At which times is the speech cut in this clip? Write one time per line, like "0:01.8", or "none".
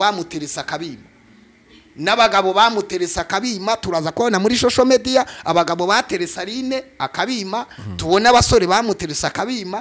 none